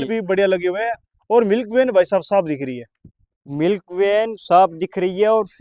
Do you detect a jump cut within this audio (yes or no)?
no